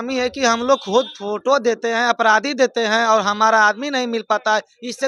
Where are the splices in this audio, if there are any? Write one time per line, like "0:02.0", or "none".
none